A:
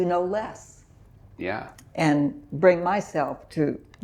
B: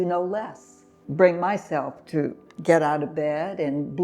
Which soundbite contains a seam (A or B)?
B